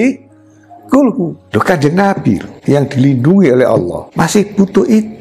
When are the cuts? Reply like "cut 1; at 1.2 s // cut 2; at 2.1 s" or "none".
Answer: cut 1; at 1.4 s // cut 2; at 2.5 s // cut 3; at 4.0 s

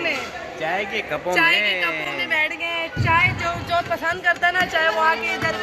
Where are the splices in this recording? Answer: none

